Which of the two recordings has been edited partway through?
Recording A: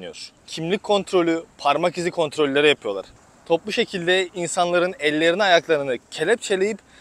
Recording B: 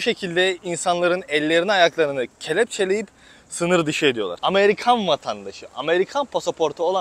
B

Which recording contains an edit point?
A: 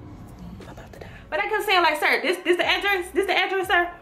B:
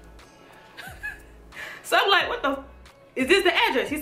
A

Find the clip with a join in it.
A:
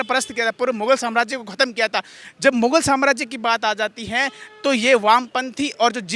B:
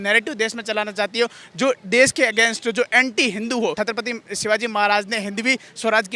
B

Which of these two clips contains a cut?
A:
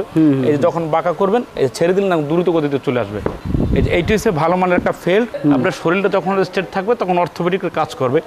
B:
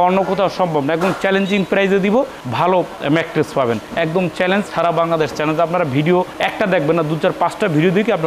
A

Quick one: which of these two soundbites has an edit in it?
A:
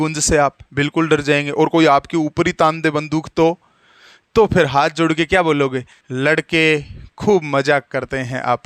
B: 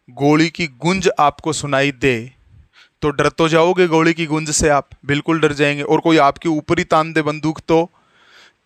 A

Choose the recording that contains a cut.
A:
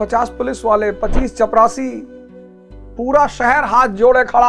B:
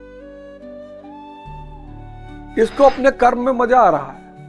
B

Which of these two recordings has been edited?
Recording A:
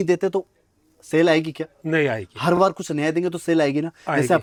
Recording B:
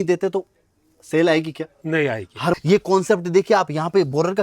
B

